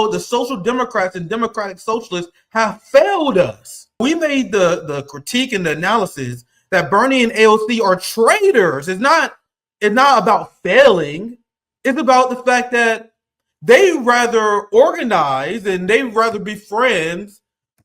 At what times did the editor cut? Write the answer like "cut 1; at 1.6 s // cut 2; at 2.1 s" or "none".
cut 1; at 4.0 s